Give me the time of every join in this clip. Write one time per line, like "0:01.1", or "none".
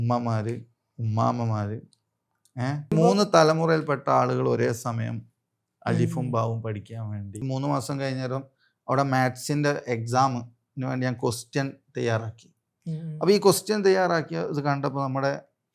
0:02.9
0:07.4

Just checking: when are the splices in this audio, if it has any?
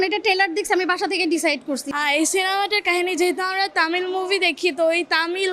0:01.8

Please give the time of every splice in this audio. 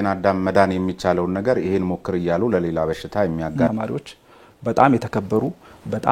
0:03.7

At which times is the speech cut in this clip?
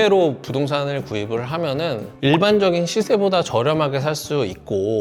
none

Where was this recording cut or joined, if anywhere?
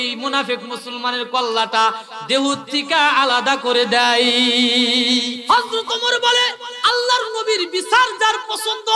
0:05.4
0:06.7

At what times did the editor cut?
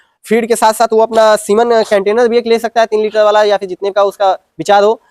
none

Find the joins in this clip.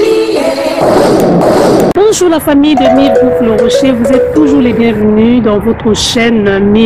none

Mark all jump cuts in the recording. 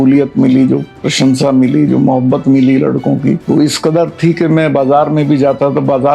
0:01.0
0:03.4

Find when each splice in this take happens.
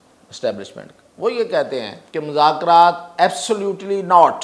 0:02.0

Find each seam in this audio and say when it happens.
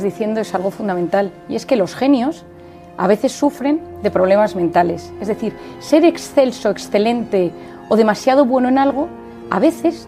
none

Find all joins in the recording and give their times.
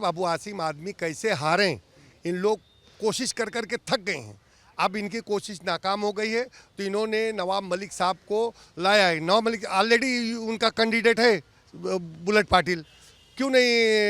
none

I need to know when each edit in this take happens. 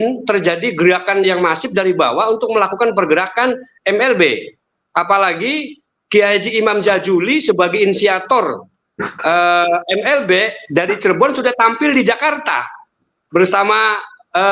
none

